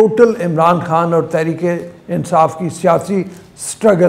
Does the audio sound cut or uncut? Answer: uncut